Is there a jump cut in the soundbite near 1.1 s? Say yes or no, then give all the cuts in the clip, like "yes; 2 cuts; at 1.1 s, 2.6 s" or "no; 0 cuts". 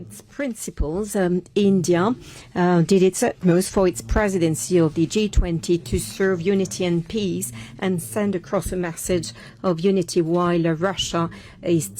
no; 0 cuts